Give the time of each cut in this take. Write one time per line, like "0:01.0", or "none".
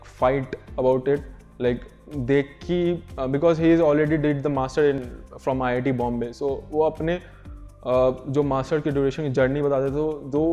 none